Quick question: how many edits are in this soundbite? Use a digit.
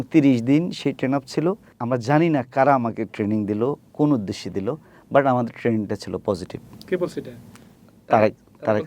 1